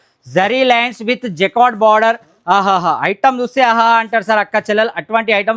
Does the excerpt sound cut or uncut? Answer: uncut